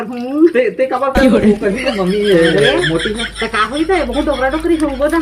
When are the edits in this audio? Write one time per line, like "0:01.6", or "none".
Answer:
none

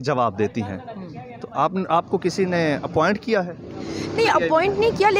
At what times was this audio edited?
none

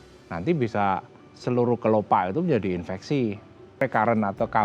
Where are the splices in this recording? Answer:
0:03.6

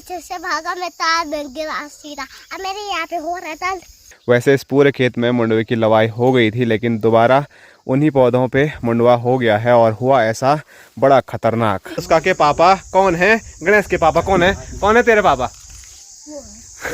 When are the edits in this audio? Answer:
0:04.1
0:12.0

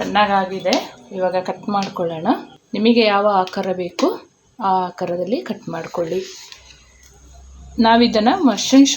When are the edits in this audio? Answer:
0:02.6

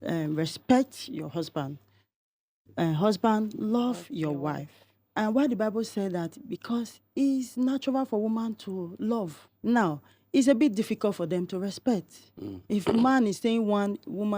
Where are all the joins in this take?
0:09.4

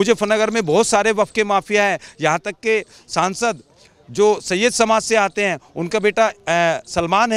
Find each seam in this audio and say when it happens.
none

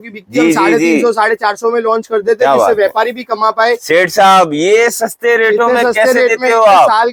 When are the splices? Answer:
none

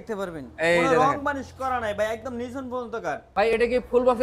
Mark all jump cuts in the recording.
0:03.2

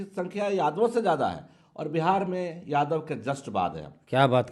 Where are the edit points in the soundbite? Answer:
none

